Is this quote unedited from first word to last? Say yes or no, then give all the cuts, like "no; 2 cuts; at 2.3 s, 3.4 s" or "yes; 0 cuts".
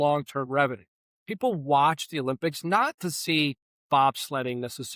no; 1 cut; at 1.2 s